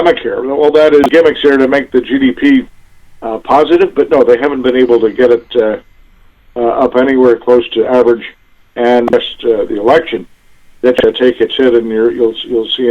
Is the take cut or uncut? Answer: cut